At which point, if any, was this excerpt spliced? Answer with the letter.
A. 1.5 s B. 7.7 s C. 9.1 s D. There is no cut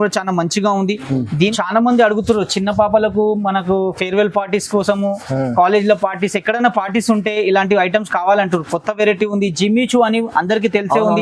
A